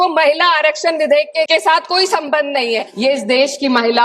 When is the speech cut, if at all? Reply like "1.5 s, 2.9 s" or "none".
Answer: 1.5 s, 2.9 s

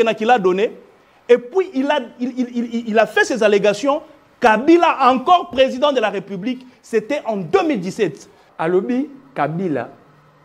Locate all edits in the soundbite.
8.4 s

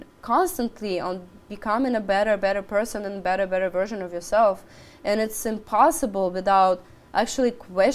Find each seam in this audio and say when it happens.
none

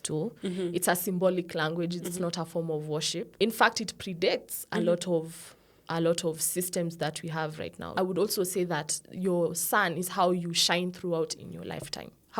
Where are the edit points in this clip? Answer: 3.3 s, 7.9 s

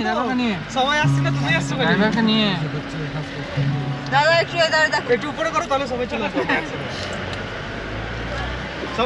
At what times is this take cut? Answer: none

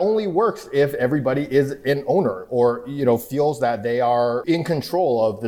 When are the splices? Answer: 4.4 s

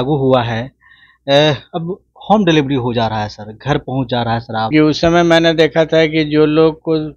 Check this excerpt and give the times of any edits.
4.7 s

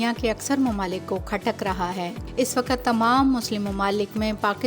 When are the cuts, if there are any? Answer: 2.2 s

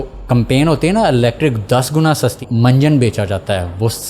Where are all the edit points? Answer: 2.4 s

